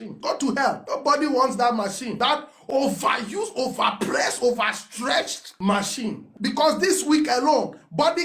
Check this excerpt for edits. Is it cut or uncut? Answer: uncut